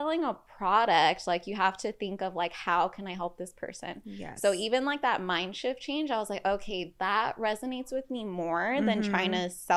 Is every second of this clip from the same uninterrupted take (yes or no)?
yes